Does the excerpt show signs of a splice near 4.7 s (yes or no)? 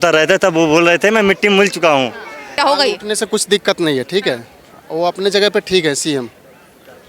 no